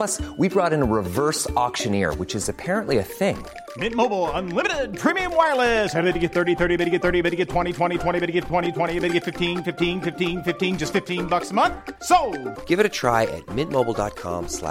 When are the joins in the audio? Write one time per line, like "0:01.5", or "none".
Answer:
none